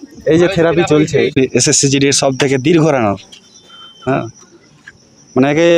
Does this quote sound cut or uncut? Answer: cut